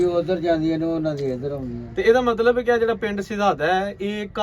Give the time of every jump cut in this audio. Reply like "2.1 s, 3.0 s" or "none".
1.8 s